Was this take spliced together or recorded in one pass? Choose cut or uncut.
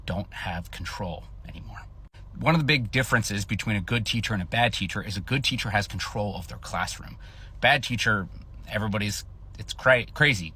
uncut